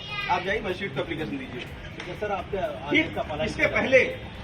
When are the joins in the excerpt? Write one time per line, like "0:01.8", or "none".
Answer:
none